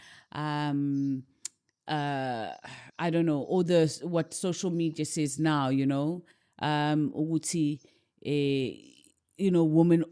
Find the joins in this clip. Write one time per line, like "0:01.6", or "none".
none